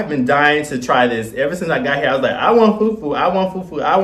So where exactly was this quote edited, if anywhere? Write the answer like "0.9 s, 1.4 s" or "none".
none